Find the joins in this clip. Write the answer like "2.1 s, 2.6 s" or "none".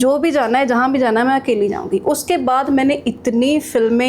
none